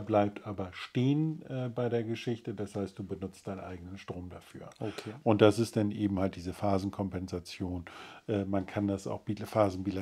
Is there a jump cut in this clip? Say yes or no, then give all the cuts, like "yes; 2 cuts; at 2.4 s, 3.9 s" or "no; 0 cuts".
no; 0 cuts